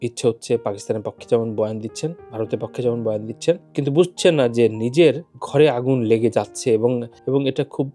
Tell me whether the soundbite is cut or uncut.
uncut